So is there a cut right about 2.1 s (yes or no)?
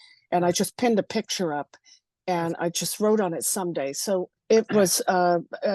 no